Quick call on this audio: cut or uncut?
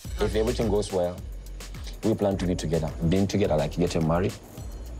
cut